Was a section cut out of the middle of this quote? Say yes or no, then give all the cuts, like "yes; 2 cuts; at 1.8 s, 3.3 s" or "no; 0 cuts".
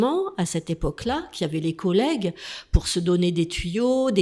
no; 0 cuts